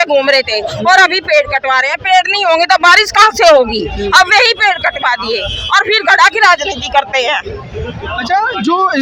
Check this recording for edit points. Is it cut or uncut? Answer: uncut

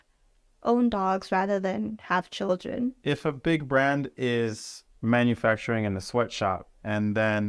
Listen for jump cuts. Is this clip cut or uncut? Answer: cut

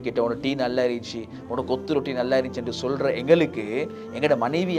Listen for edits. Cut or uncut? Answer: uncut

